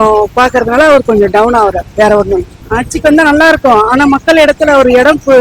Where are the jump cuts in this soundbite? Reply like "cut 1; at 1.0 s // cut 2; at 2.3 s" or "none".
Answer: cut 1; at 2.6 s